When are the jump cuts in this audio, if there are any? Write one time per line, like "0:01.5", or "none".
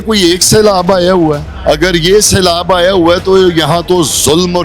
0:01.5